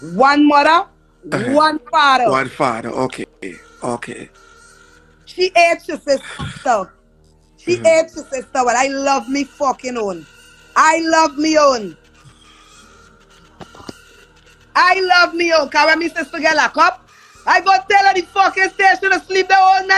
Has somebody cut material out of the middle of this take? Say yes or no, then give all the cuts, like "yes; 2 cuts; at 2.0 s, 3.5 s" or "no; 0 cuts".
no; 0 cuts